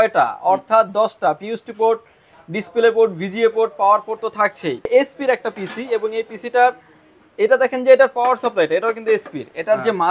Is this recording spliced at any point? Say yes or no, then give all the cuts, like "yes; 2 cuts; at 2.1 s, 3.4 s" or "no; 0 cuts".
yes; 1 cut; at 4.9 s